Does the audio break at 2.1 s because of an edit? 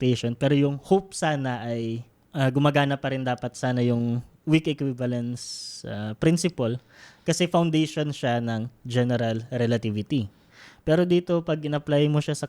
yes; 2 cuts; at 2.1 s, 4.3 s

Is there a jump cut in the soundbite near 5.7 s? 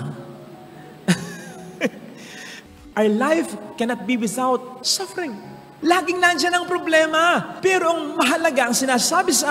no; 1 cut; at 2.6 s

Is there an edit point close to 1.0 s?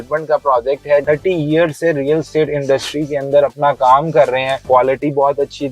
yes; 2 cuts; at 1.0 s, 4.5 s

